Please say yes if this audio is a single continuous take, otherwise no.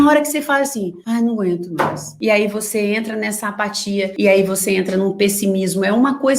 no